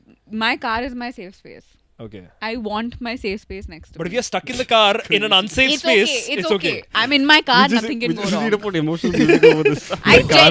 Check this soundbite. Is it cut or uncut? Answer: uncut